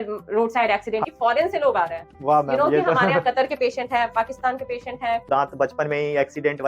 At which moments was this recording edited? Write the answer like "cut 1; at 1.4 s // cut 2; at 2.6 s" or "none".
cut 1; at 1.0 s // cut 2; at 5.3 s